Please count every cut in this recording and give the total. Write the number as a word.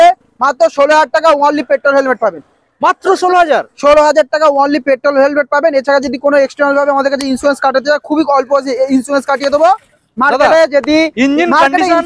zero